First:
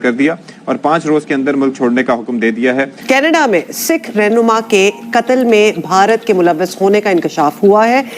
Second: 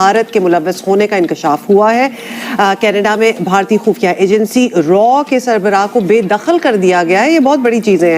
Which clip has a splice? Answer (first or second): first